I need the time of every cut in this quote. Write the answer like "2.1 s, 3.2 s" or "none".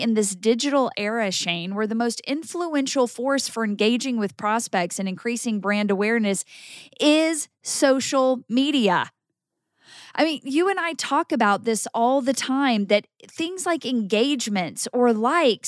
none